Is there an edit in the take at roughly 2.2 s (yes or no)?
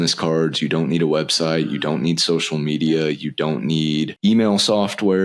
no